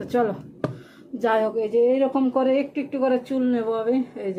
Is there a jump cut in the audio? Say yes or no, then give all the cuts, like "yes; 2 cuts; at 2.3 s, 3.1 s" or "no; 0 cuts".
no; 0 cuts